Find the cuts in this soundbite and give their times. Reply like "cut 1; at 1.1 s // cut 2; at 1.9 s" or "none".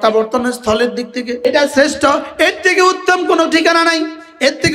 cut 1; at 1.4 s